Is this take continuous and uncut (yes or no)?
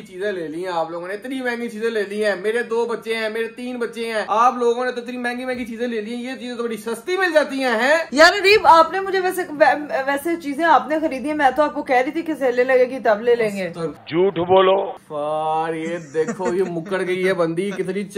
yes